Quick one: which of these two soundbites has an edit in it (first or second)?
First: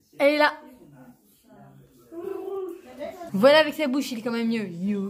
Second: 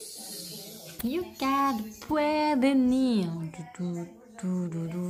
second